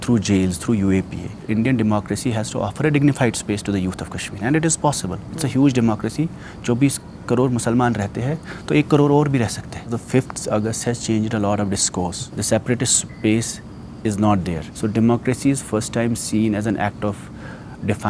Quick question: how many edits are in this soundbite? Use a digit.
4